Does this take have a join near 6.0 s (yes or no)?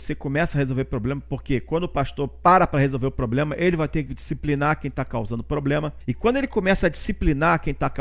yes